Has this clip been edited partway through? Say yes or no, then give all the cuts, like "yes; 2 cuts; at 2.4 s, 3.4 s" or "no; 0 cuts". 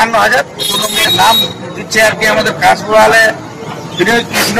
yes; 1 cut; at 1.1 s